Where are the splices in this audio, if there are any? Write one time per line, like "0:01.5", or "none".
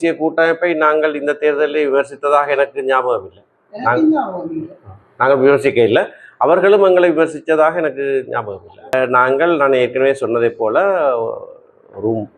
0:08.9